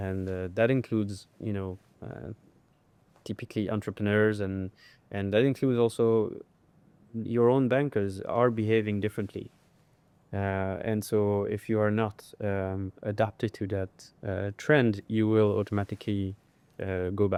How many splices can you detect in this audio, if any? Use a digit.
0